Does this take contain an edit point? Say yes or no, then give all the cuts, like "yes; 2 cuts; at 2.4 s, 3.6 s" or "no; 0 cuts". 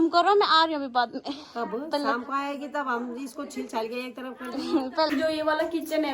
yes; 1 cut; at 5.1 s